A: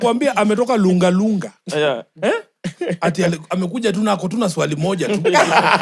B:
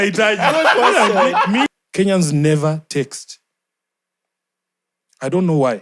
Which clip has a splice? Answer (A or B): B